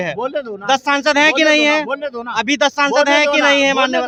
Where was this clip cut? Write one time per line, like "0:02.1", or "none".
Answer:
none